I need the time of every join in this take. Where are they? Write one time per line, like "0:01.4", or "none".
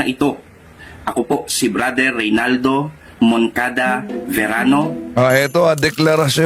none